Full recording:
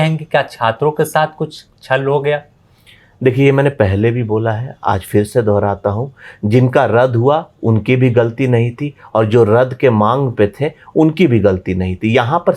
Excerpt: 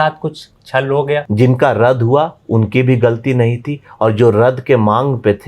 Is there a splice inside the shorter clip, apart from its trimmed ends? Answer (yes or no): yes